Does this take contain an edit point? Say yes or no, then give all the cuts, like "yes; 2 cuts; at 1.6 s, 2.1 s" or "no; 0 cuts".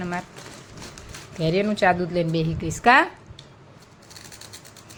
no; 0 cuts